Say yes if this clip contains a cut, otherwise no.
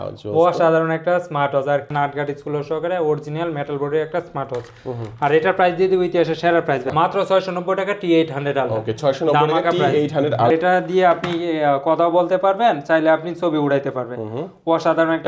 yes